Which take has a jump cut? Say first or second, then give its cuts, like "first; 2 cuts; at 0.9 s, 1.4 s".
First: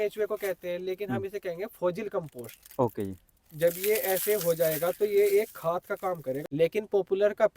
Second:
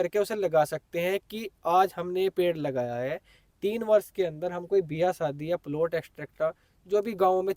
first; 1 cut; at 6.4 s